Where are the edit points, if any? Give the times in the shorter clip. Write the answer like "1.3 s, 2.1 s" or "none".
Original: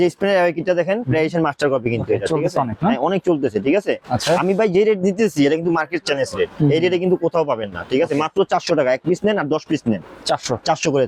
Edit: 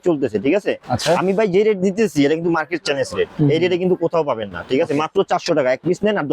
none